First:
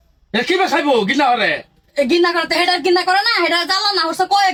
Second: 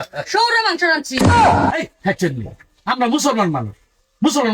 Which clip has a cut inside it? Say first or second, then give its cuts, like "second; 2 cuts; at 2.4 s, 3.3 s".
second; 2 cuts; at 1.1 s, 1.9 s